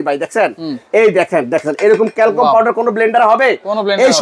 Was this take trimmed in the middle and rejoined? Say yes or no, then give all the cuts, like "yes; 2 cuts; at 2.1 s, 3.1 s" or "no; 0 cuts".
no; 0 cuts